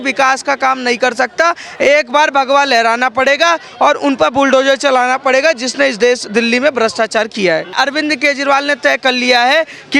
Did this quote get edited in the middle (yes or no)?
yes